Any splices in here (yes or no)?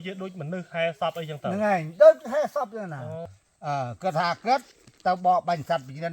yes